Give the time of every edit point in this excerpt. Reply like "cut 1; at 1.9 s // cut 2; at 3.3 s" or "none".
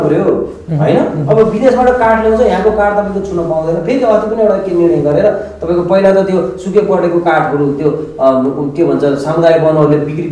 none